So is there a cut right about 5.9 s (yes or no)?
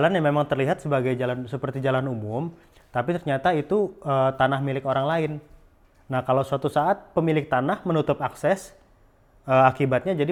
no